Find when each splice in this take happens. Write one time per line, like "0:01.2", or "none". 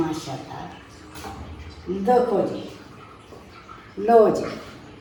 none